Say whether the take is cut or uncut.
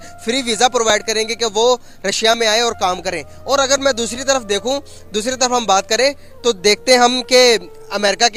uncut